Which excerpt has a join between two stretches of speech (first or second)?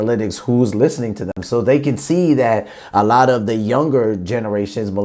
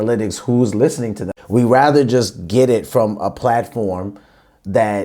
second